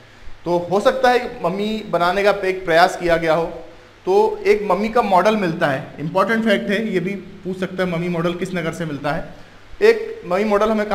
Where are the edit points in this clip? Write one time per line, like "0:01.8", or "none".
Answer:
none